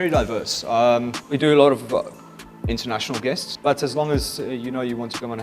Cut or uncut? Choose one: cut